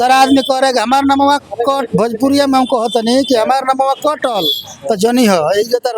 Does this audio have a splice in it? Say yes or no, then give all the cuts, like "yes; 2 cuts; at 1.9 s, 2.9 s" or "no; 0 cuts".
no; 0 cuts